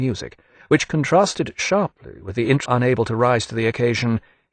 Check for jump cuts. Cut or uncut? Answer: uncut